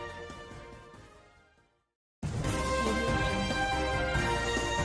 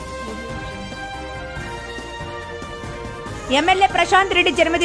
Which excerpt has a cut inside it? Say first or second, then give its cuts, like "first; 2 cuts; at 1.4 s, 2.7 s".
second; 1 cut; at 3.5 s